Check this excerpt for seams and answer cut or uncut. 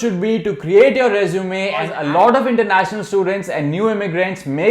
cut